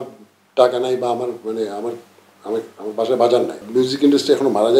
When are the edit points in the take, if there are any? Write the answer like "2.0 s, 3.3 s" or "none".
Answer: 3.6 s